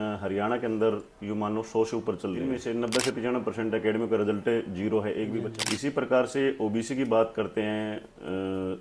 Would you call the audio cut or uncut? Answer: cut